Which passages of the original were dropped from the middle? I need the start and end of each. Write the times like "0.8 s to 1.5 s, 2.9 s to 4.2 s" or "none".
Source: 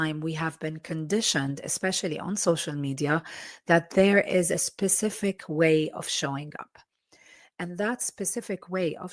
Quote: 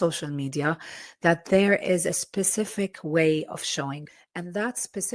6.6 s to 7.4 s